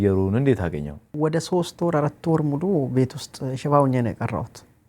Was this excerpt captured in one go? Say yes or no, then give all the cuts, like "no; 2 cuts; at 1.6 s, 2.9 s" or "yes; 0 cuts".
no; 1 cut; at 1.1 s